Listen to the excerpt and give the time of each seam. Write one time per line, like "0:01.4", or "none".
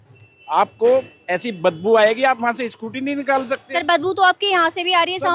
none